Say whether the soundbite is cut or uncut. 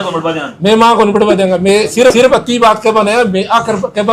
uncut